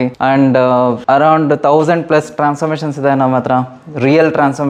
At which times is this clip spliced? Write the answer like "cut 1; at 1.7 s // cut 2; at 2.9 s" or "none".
none